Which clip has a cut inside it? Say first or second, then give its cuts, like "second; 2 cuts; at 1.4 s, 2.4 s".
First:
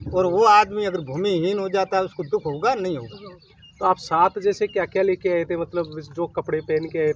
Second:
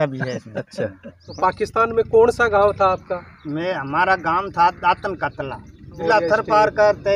second; 2 cuts; at 1.2 s, 6.0 s